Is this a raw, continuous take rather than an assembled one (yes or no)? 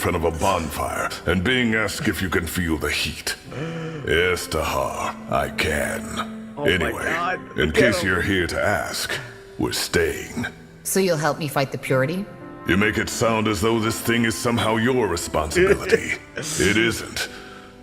no